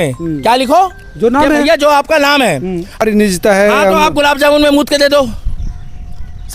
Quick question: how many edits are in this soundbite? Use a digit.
1